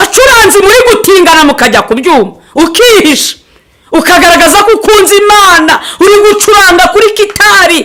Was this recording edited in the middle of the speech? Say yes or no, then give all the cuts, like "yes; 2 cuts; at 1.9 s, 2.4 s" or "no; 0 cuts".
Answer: no; 0 cuts